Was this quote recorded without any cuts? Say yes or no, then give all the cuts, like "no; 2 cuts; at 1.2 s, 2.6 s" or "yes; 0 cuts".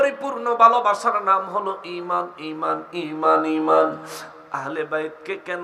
yes; 0 cuts